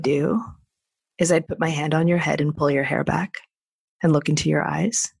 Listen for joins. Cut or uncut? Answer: uncut